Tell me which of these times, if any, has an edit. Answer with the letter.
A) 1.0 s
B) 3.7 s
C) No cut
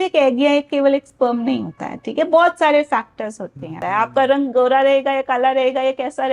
B